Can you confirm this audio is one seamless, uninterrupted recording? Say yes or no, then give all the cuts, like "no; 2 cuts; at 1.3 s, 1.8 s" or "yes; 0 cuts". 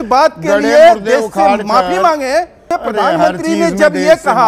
no; 1 cut; at 2.6 s